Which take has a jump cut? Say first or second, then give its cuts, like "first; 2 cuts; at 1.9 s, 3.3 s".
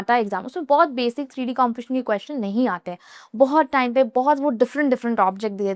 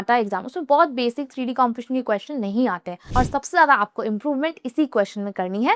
second; 1 cut; at 3.0 s